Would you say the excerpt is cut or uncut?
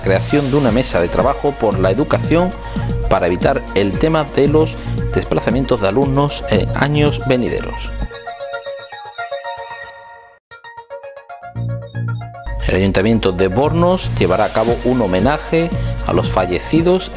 uncut